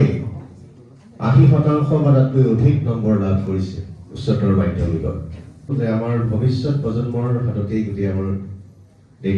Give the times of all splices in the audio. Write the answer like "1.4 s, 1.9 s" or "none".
5.7 s

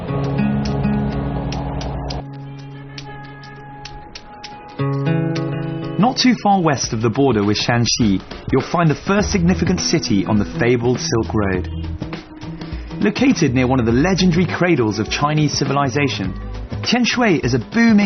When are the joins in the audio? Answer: none

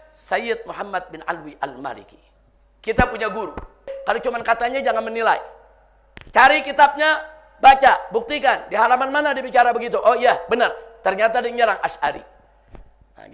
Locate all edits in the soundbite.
4.0 s

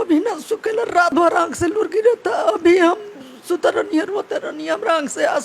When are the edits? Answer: 1.1 s

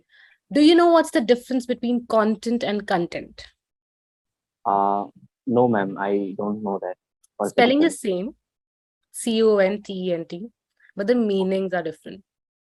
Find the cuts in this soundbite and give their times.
none

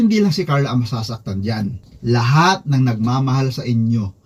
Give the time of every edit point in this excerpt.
none

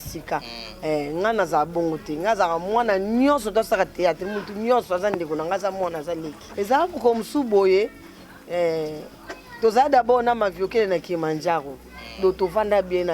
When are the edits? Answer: 6.4 s

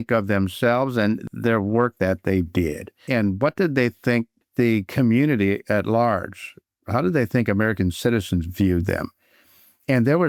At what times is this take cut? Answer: none

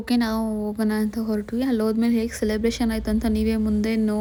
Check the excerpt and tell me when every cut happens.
none

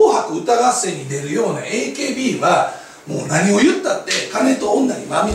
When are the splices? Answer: none

